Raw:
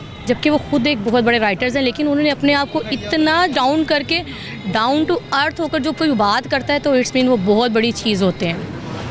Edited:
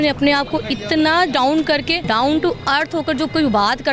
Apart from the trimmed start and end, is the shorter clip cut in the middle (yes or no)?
yes